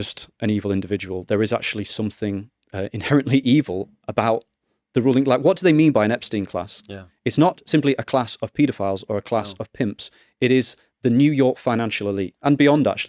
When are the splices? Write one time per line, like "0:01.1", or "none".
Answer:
none